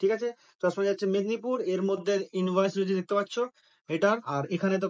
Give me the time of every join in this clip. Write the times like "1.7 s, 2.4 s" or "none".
none